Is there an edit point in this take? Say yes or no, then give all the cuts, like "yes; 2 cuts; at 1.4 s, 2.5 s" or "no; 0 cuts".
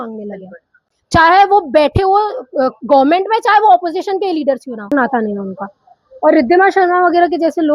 yes; 1 cut; at 4.9 s